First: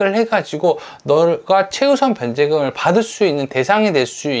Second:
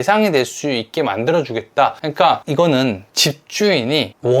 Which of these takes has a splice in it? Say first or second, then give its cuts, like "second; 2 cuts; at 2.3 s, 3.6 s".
second; 1 cut; at 2.3 s